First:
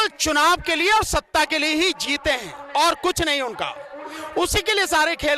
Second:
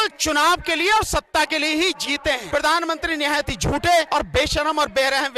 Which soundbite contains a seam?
second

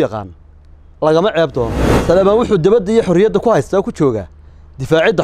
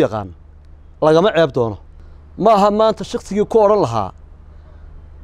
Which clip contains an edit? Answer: first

